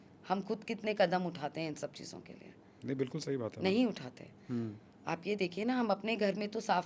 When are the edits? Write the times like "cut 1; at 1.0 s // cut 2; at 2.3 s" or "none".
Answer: none